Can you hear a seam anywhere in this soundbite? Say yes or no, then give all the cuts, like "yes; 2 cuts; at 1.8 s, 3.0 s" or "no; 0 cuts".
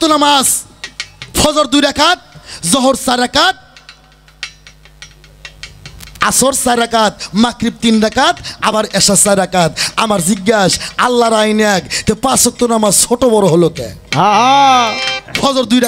no; 0 cuts